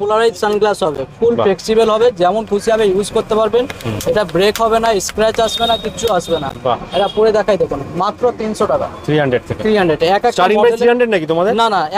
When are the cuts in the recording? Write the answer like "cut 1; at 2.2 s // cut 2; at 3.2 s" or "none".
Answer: none